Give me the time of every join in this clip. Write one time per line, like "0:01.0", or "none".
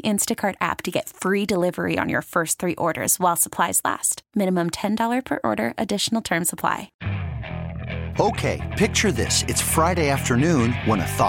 0:06.9

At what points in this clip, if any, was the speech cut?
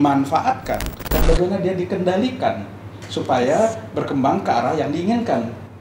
0:00.9

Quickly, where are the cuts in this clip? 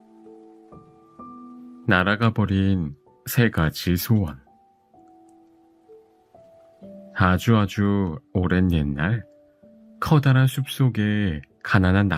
0:01.8

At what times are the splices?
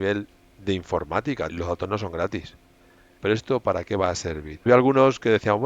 0:01.5
0:03.1
0:04.7

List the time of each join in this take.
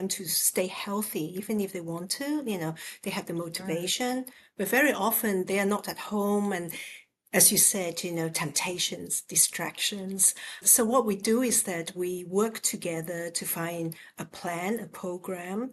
none

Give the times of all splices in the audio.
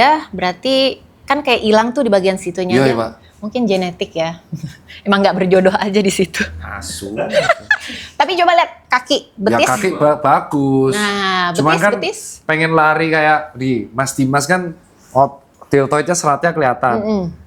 none

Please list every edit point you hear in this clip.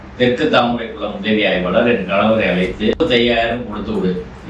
0:03.0

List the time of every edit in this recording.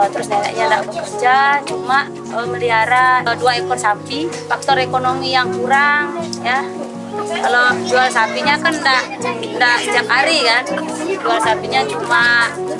0:04.2

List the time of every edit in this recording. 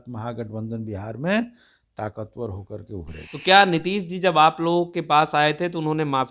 0:03.2

